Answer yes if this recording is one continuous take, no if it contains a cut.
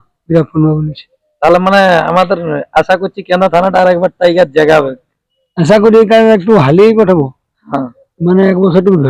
yes